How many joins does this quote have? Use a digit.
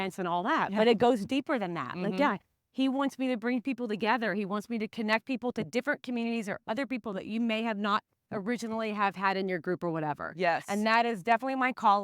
1